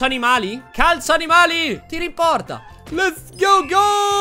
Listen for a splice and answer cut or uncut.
cut